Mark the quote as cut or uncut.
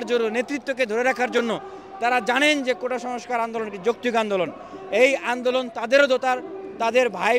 uncut